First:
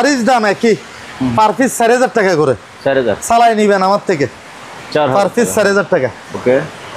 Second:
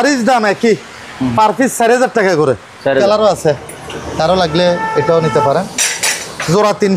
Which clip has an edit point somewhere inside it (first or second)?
second